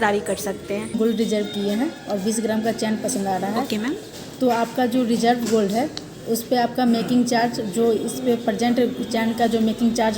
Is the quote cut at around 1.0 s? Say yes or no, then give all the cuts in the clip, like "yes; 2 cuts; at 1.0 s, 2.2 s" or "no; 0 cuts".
yes; 1 cut; at 1.0 s